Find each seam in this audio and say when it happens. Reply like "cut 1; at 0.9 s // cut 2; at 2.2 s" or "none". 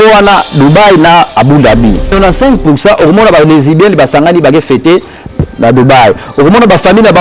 cut 1; at 2.1 s